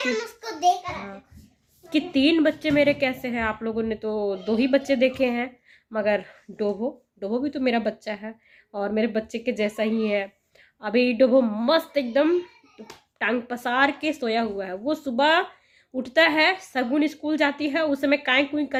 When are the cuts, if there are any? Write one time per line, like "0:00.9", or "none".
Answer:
none